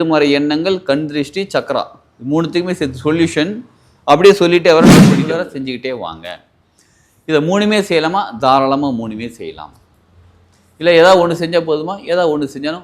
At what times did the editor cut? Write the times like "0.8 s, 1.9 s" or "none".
5.2 s